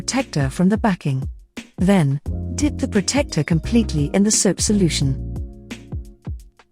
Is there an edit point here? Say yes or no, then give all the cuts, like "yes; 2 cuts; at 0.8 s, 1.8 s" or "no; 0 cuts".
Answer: yes; 1 cut; at 5.2 s